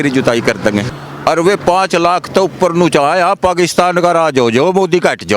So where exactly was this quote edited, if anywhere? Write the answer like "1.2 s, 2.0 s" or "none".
0.9 s